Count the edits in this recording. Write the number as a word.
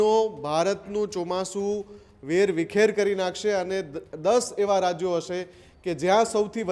zero